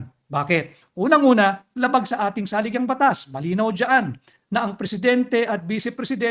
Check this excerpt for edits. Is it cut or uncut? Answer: uncut